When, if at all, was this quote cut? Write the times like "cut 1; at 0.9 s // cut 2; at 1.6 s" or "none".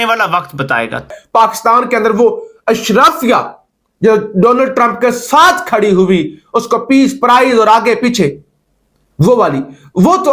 cut 1; at 1.1 s